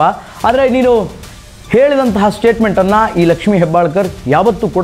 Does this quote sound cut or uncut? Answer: uncut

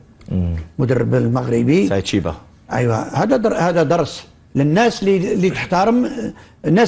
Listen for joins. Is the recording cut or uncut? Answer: uncut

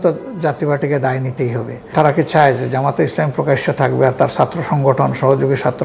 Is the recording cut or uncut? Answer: cut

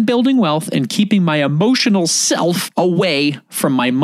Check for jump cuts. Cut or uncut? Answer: cut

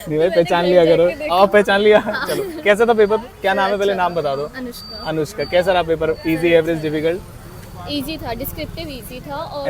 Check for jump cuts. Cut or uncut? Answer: uncut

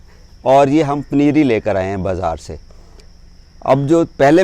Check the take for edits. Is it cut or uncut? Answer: uncut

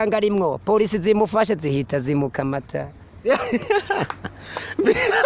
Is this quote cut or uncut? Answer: uncut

